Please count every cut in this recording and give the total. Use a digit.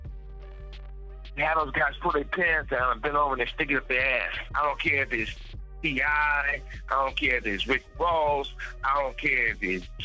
1